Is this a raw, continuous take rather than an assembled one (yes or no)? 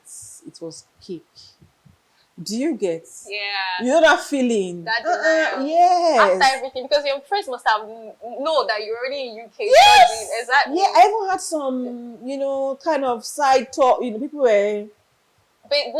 yes